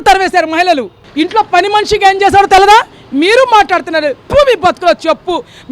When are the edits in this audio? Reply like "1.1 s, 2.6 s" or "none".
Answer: 1.0 s